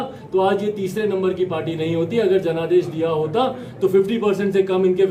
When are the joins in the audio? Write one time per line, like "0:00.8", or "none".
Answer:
none

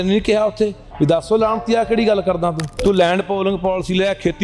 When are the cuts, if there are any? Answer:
0:02.7

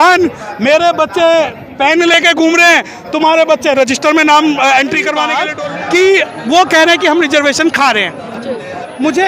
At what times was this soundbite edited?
0:05.4

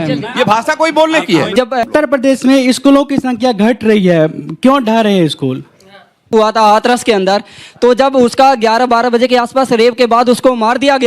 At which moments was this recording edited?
0:01.8
0:06.3

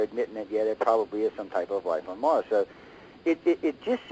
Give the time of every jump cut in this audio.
0:01.1

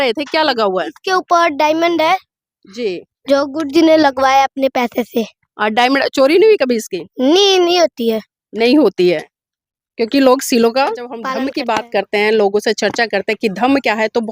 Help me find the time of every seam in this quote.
0:11.2

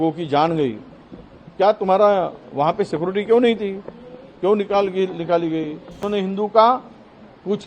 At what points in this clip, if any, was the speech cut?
0:06.0

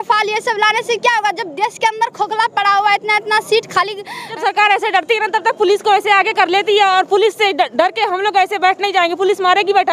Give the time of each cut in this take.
0:04.3

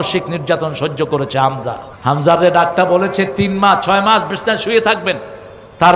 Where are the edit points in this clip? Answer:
0:01.9

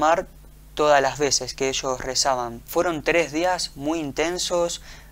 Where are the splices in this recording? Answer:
0:02.6

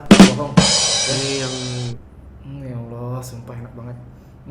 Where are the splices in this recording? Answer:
0:02.0

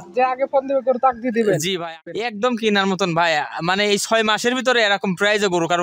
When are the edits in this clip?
0:02.2
0:03.2

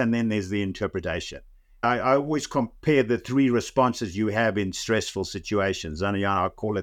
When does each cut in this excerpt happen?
0:01.8

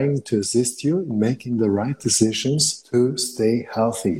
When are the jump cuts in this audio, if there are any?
0:02.7

